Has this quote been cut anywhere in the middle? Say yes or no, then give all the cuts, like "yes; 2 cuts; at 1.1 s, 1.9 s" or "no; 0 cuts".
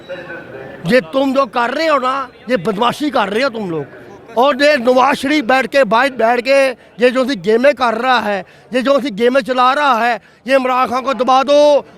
no; 0 cuts